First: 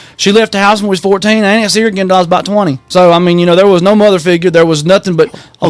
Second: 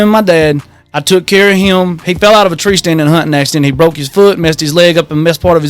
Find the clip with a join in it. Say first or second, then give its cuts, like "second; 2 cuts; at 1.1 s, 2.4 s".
first; 1 cut; at 2.8 s